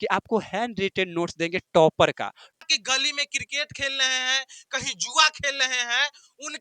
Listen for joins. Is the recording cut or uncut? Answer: cut